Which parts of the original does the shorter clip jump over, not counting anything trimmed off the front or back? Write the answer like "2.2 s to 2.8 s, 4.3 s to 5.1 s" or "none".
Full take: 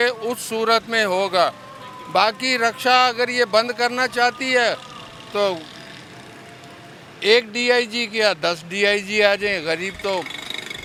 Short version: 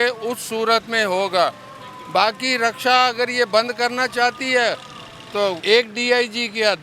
5.6 s to 7.2 s